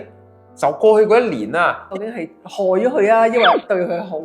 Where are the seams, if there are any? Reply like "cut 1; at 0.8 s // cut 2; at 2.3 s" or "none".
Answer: cut 1; at 1.8 s